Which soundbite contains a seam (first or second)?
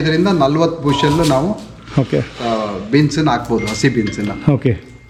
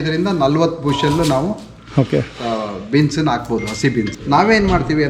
second